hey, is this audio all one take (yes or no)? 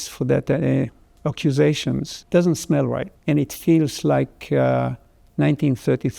no